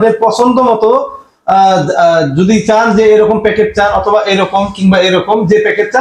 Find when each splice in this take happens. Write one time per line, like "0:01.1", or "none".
none